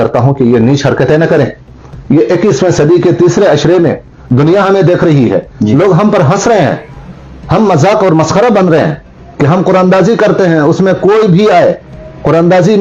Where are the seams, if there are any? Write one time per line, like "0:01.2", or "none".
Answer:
none